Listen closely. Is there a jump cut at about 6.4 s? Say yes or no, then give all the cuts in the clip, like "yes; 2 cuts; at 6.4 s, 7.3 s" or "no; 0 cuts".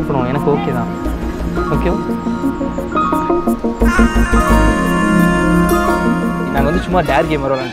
yes; 1 cut; at 6.4 s